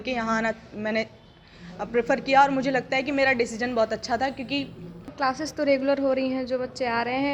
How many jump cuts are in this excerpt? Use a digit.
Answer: 1